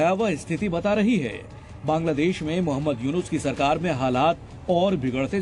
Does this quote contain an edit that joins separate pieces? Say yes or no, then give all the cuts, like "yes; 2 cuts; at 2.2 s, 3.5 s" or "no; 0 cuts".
no; 0 cuts